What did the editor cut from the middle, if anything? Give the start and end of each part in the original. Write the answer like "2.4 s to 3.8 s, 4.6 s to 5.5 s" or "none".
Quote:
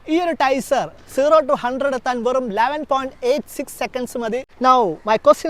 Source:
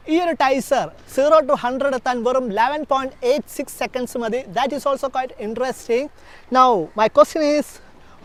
4.5 s to 6.4 s

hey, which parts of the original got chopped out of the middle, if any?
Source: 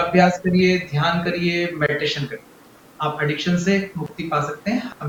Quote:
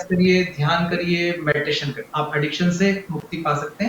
2.3 s to 2.8 s

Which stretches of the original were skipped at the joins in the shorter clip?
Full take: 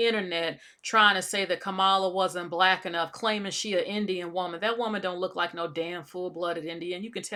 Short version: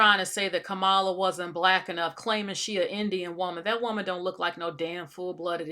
none

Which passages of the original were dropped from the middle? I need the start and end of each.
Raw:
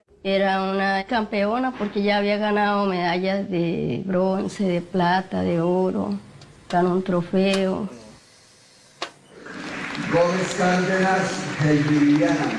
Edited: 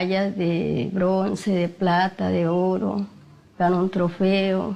none

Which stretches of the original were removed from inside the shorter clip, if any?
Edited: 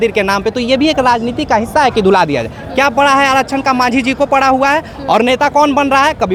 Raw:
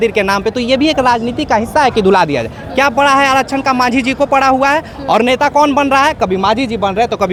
none

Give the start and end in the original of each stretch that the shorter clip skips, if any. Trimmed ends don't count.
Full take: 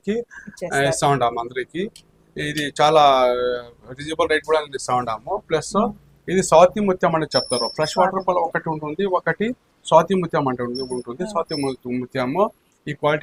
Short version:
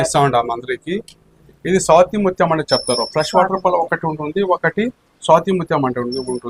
2.3 s to 6.1 s

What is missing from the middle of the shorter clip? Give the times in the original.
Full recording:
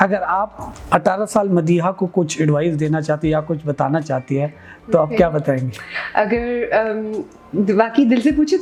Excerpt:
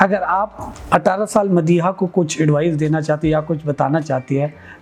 none

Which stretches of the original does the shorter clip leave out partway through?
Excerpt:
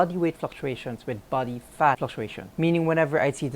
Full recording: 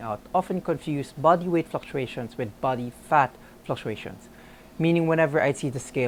3.5 s to 4.4 s

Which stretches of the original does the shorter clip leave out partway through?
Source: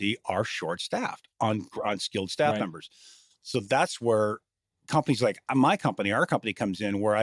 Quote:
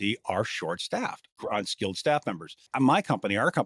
1.3 s to 1.6 s, 3.0 s to 5.4 s

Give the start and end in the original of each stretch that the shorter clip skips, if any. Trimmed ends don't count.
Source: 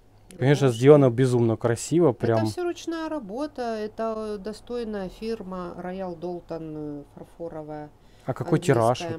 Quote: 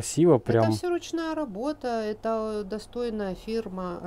none

